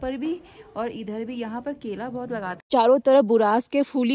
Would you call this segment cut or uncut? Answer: cut